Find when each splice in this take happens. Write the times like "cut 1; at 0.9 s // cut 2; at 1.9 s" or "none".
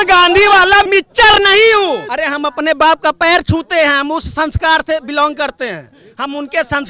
cut 1; at 0.9 s // cut 2; at 2.1 s